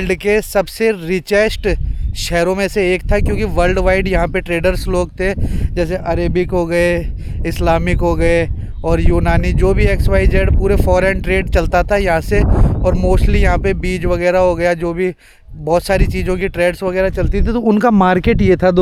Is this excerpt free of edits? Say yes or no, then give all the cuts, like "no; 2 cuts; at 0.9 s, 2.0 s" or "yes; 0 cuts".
yes; 0 cuts